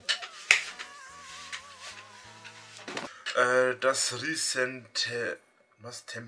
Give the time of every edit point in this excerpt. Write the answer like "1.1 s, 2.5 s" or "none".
3.1 s